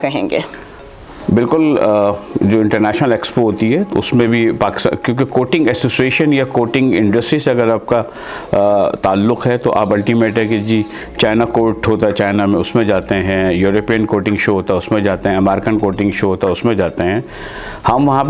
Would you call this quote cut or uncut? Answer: uncut